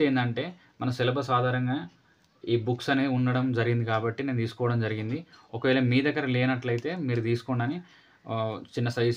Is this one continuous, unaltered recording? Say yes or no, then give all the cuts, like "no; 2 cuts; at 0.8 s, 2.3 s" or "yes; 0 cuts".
yes; 0 cuts